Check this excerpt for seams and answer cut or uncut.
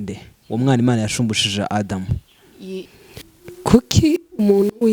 cut